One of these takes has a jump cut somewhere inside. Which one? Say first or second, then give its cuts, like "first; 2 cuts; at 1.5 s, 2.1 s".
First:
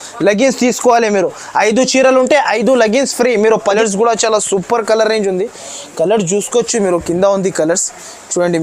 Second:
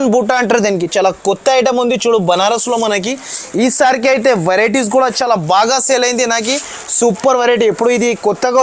first; 1 cut; at 3.7 s